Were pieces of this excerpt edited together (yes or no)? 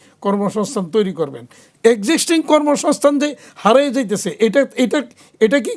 no